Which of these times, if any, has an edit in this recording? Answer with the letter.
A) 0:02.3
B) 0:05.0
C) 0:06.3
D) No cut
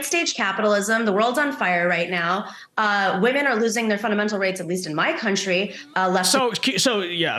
D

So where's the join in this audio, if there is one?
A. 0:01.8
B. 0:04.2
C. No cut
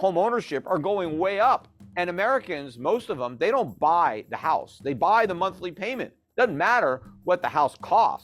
A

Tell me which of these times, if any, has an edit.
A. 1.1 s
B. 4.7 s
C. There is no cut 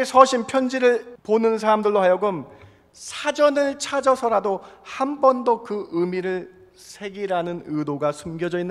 A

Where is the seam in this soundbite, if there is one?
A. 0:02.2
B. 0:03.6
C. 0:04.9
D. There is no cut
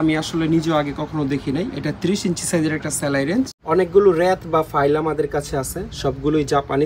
B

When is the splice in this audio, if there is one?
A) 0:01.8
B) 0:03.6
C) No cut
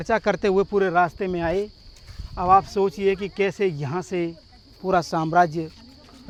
C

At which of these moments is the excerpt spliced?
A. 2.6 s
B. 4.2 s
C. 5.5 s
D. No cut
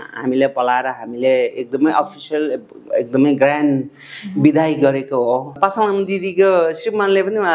C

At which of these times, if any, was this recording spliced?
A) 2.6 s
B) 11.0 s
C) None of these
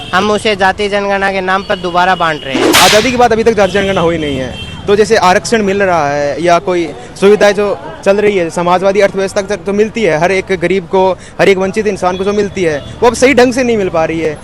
A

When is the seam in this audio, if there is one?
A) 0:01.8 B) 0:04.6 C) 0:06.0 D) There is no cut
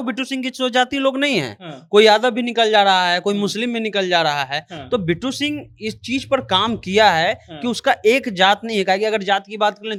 D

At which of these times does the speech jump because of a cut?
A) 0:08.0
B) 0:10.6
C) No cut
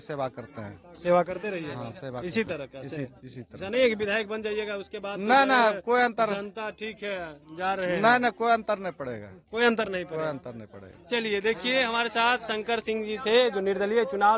C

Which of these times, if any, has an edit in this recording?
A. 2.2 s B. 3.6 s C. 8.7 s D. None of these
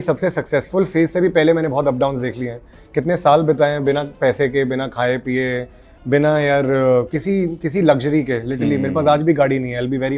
D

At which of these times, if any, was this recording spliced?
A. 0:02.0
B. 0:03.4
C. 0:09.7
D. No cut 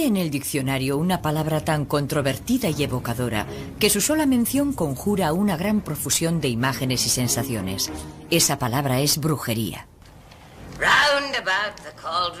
A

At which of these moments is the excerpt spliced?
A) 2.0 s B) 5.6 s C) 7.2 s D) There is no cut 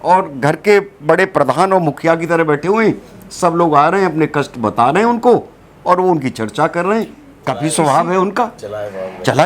C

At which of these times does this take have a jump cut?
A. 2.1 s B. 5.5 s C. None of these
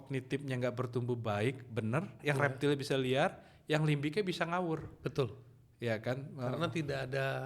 A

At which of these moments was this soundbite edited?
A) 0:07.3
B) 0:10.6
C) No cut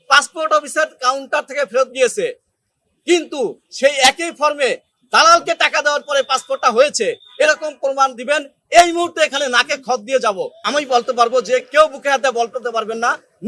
B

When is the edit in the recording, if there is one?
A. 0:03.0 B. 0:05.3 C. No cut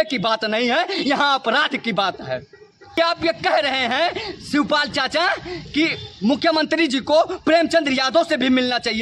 A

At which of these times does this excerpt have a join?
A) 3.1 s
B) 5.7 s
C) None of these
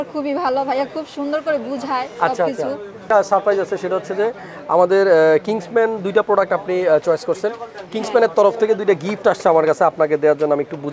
A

